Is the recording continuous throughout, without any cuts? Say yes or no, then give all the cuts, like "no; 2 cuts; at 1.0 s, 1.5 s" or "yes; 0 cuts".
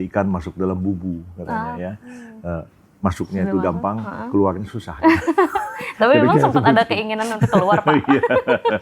yes; 0 cuts